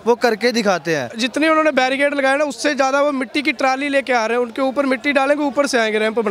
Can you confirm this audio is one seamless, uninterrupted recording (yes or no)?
no